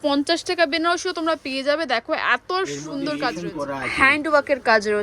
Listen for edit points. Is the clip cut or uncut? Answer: cut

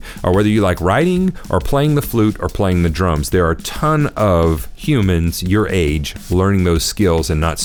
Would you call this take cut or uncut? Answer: uncut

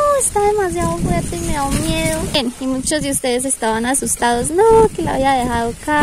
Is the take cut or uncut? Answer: cut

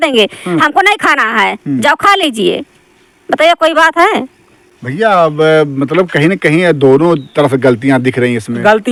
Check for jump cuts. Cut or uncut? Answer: uncut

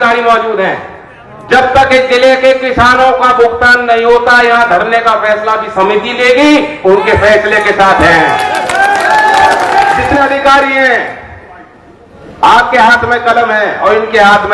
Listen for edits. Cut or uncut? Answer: cut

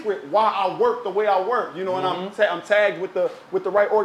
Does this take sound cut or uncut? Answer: uncut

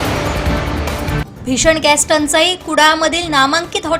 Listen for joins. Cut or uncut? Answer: cut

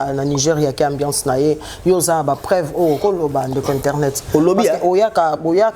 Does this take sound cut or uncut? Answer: uncut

